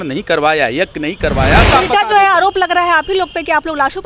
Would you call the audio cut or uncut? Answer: cut